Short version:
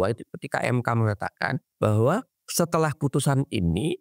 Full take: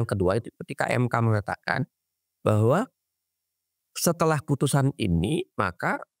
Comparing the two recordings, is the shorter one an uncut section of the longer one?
no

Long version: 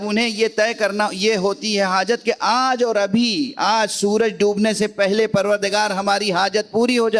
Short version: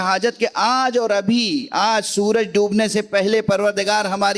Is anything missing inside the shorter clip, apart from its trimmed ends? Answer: no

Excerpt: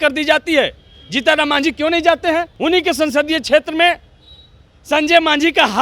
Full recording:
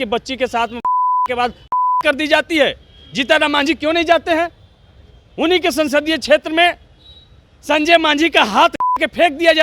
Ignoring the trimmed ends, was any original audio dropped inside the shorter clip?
yes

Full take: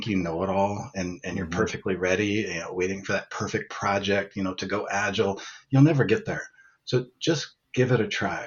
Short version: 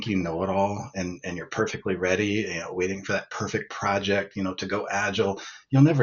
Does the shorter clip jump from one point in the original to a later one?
no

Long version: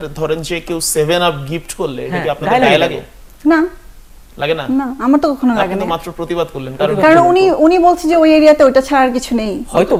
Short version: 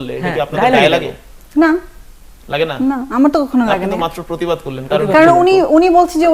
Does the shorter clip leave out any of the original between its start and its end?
no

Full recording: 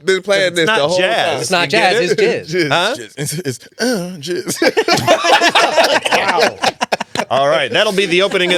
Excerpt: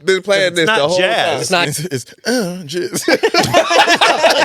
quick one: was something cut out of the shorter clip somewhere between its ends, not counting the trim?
yes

